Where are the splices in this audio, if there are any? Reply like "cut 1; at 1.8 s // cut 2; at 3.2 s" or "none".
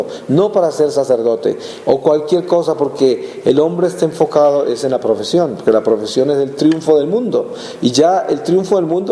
cut 1; at 6.0 s